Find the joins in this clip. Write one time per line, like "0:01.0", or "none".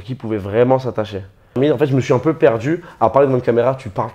0:01.6